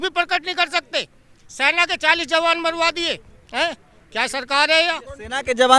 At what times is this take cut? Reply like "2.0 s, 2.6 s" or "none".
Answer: none